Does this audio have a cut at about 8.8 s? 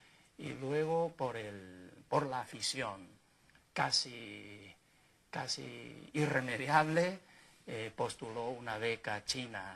yes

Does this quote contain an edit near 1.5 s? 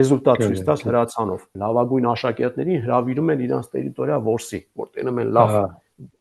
yes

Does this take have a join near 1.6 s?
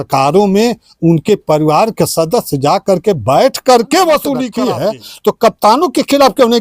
no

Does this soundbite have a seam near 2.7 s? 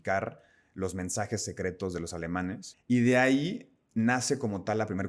yes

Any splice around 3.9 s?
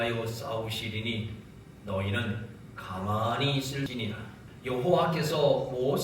yes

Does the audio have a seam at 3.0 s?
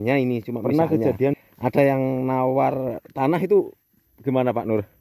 no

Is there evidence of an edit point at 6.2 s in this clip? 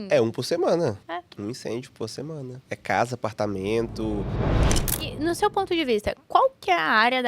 no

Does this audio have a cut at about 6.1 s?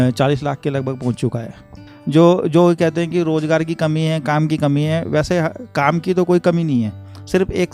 no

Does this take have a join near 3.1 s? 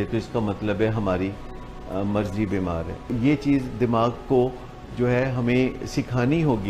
yes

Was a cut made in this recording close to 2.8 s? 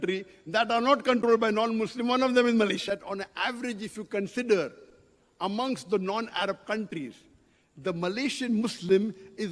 yes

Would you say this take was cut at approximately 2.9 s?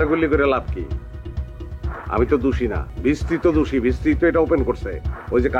yes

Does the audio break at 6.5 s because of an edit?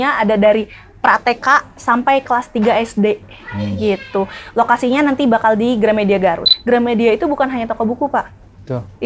yes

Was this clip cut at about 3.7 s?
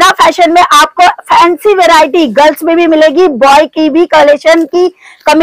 no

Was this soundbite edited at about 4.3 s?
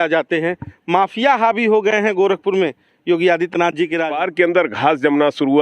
yes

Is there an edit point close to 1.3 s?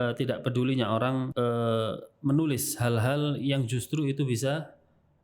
yes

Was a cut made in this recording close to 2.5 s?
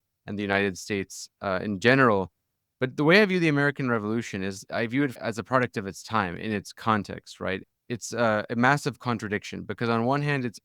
no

